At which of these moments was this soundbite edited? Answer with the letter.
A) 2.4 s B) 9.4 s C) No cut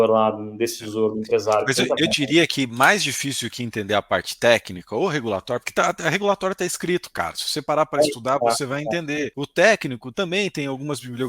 B